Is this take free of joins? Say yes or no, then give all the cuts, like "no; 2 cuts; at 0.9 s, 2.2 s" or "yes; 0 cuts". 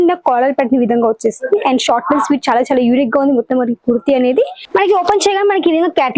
no; 1 cut; at 4.6 s